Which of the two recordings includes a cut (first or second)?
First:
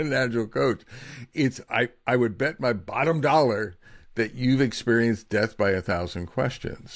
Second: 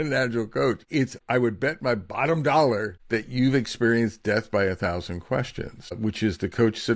second